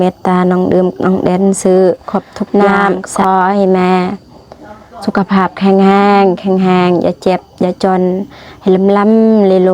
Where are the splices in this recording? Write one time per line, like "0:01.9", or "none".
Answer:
0:03.2